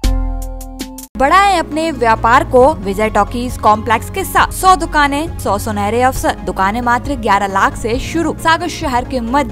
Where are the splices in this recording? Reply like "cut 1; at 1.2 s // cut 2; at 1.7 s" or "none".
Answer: cut 1; at 1.2 s // cut 2; at 2.8 s // cut 3; at 4.5 s // cut 4; at 5.3 s // cut 5; at 6.4 s // cut 6; at 8.4 s